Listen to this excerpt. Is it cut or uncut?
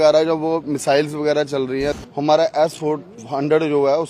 cut